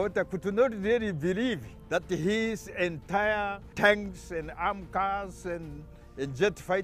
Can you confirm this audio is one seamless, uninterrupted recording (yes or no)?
no